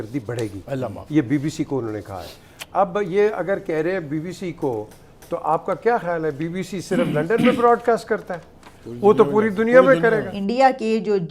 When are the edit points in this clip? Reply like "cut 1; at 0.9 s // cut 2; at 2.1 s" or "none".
cut 1; at 10.3 s